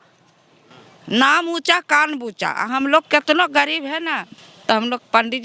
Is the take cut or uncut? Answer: uncut